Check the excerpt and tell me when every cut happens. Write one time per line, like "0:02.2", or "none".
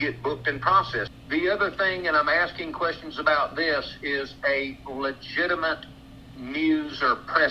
0:01.1